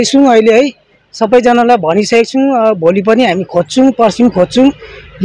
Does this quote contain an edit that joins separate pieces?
no; 0 cuts

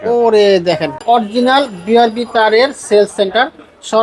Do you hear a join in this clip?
yes; 1 cut; at 1.0 s

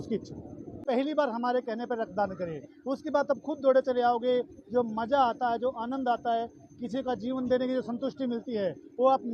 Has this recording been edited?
yes; 1 cut; at 1.0 s

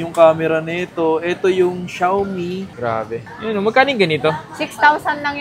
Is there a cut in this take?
yes; 1 cut; at 3.2 s

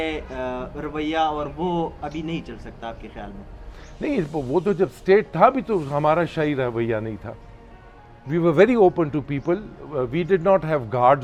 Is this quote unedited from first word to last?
yes; 0 cuts

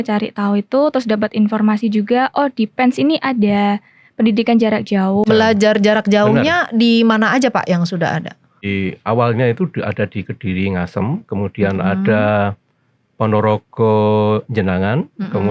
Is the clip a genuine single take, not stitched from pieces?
no; 2 cuts; at 5.2 s, 8.7 s

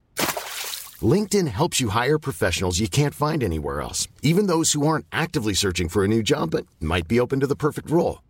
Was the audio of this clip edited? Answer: no; 0 cuts

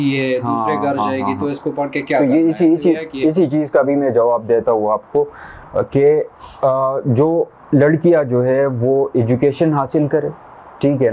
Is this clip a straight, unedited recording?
yes; 0 cuts

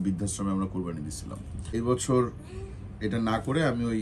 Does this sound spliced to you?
yes; 1 cut; at 1.7 s

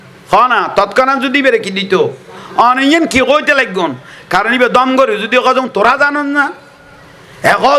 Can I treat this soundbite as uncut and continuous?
yes; 0 cuts

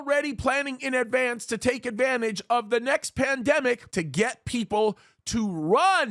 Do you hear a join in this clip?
yes; 1 cut; at 3.9 s

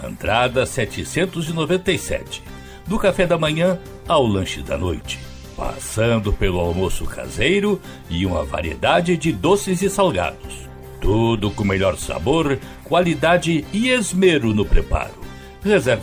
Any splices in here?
no; 0 cuts

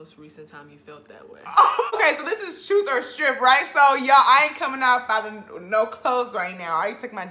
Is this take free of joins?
yes; 0 cuts

